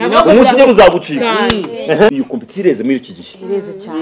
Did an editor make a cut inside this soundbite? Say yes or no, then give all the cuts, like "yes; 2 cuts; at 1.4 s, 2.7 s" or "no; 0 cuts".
yes; 1 cut; at 2.1 s